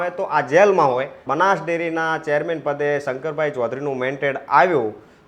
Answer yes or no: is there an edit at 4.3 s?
no